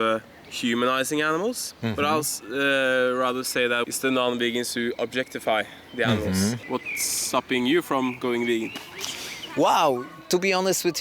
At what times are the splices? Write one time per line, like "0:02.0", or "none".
0:03.9
0:06.6